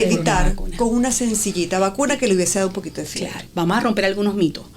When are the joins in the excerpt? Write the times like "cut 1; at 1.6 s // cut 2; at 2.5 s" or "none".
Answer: cut 1; at 3.3 s